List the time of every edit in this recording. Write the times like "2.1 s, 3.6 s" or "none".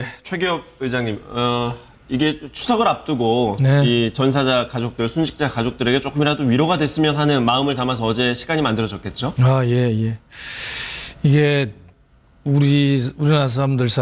9.1 s

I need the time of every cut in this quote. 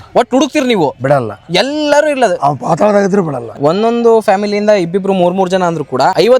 3.6 s

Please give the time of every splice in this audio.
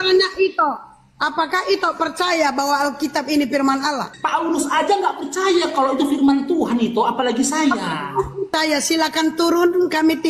none

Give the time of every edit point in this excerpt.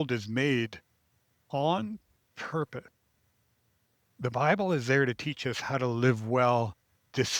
4.1 s

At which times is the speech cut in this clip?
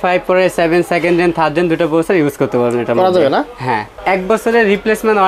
3.9 s

